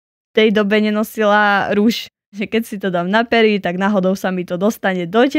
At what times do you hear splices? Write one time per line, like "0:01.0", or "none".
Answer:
0:02.4